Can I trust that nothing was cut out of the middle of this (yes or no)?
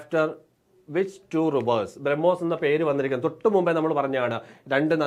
yes